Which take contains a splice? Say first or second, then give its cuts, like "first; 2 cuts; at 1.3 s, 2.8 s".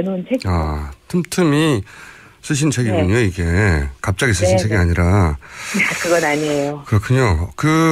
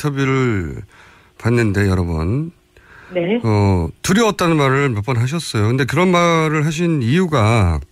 first; 1 cut; at 5.3 s